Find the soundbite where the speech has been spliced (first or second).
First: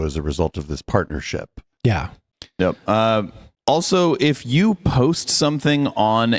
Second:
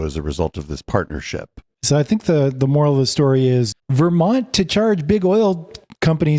second